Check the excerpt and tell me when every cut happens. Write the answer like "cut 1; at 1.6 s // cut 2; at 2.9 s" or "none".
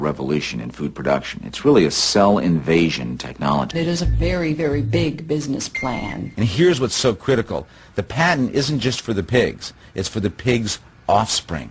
cut 1; at 3.7 s // cut 2; at 6.2 s